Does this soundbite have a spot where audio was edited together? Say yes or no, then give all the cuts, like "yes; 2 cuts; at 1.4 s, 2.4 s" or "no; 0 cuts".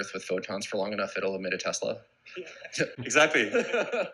no; 0 cuts